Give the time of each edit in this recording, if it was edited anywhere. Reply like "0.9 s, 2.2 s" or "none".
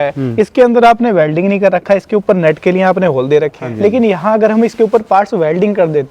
3.6 s

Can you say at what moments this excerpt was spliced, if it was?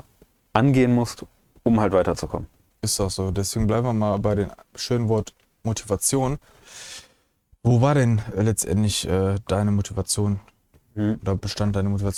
none

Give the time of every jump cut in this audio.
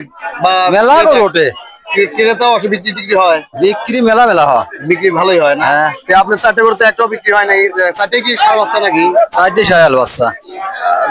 none

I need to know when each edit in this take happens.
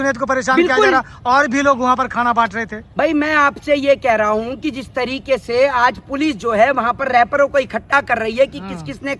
none

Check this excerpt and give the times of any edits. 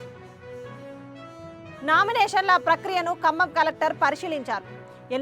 1.3 s

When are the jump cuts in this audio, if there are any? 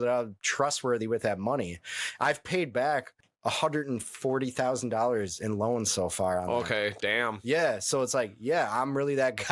3.2 s

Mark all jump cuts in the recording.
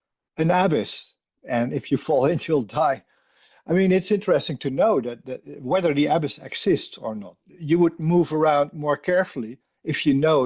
7.4 s

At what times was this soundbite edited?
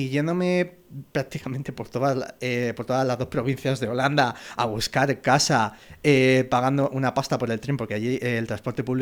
none

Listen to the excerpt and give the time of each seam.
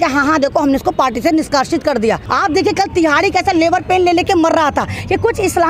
2.2 s

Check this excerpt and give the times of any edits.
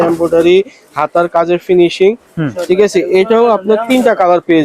none

